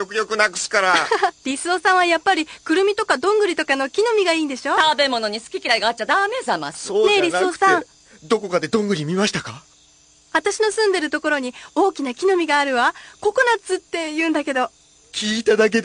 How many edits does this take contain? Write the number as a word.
one